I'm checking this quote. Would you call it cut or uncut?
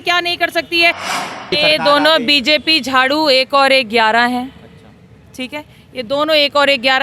cut